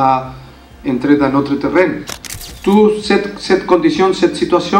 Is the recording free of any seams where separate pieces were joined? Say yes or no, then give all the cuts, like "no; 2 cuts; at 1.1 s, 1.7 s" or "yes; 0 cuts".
no; 1 cut; at 2.1 s